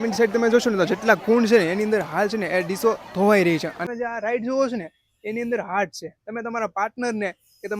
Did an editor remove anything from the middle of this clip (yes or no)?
yes